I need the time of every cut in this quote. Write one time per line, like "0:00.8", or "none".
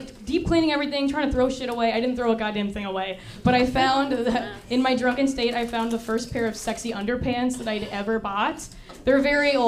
none